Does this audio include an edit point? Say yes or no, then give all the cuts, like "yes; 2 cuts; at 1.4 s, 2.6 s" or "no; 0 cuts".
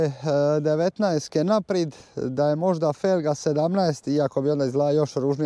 no; 0 cuts